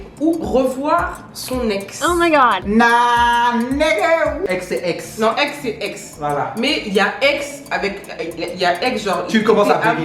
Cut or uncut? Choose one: cut